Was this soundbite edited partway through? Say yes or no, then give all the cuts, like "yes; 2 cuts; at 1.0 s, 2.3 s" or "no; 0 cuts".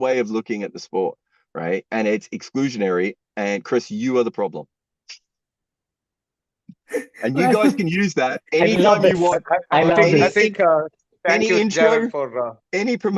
no; 0 cuts